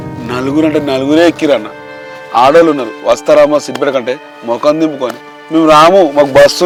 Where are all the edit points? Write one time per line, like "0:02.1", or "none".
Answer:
none